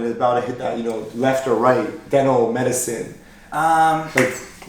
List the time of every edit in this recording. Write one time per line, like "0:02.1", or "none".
none